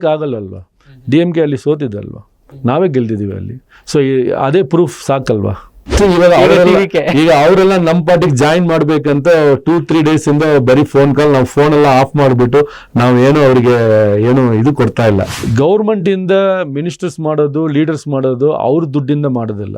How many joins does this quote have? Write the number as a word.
two